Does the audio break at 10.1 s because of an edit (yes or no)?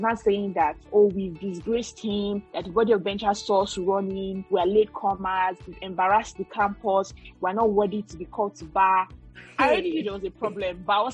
no